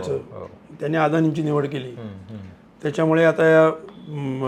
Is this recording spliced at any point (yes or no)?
no